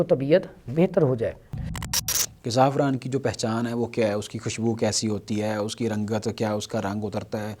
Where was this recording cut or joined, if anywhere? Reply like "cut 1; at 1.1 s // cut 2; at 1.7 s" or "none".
cut 1; at 1.9 s